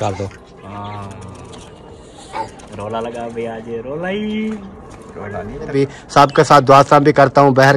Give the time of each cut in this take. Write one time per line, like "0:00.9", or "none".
0:05.7